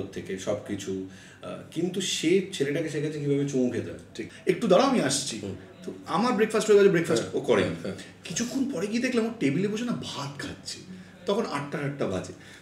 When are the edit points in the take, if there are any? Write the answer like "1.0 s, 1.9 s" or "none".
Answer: 4.3 s